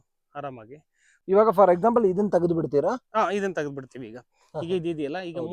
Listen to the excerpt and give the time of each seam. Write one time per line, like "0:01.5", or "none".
0:01.1